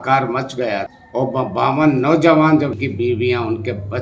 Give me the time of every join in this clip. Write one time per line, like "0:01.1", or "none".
0:01.0
0:02.8